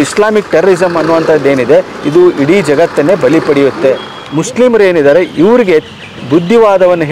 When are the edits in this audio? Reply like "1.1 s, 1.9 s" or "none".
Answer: 4.2 s